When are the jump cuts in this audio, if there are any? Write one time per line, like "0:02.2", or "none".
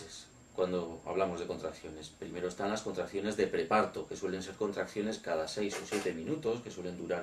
none